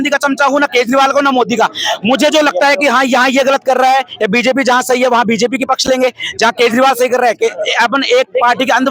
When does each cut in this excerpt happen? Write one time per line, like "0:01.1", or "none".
none